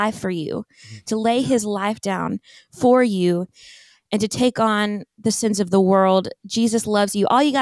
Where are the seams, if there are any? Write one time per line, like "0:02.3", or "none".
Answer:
none

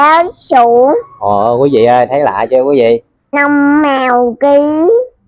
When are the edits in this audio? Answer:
0:03.2

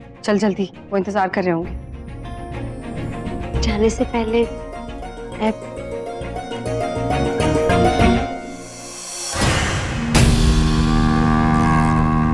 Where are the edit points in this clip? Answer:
0:03.3

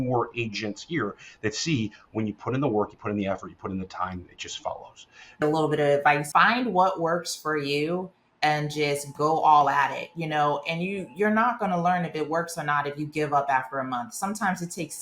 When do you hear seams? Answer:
0:05.4
0:06.2

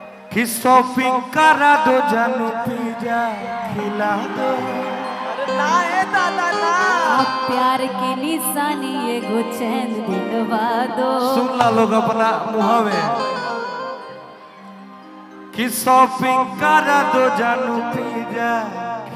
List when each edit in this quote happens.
none

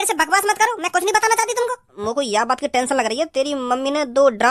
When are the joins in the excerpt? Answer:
0:01.9

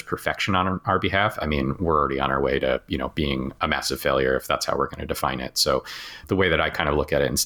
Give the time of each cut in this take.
none

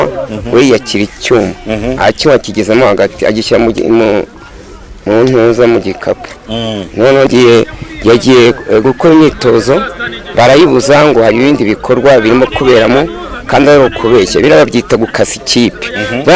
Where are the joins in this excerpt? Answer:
0:07.3

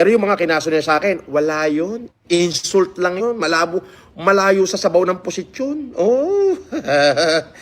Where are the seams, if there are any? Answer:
0:03.7

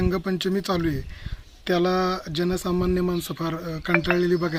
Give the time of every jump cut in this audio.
none

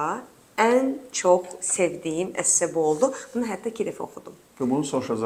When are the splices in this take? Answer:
none

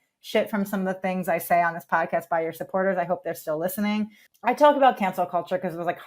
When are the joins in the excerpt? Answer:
0:04.2

